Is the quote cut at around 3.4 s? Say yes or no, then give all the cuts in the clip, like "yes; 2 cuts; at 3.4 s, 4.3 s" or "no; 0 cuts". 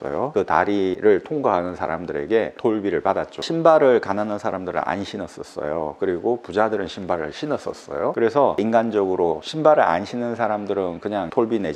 yes; 1 cut; at 3.4 s